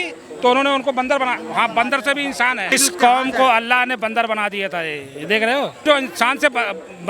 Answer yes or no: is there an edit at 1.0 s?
no